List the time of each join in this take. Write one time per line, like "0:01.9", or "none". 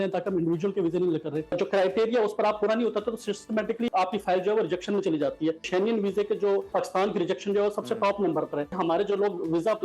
0:01.6
0:03.9
0:05.6
0:06.7
0:08.7